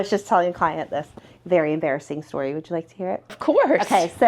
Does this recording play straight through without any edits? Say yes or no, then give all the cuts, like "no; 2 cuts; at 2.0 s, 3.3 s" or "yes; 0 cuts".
no; 1 cut; at 3.4 s